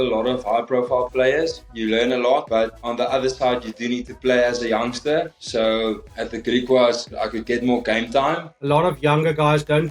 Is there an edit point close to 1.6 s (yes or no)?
yes